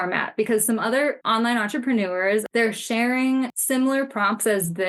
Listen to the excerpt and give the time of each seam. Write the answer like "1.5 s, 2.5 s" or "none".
1.2 s, 2.5 s, 3.6 s